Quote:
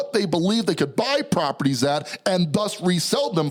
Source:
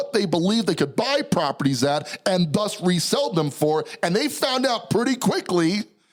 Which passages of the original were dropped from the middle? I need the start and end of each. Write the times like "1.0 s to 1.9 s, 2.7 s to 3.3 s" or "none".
none